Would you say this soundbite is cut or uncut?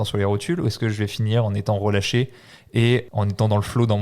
cut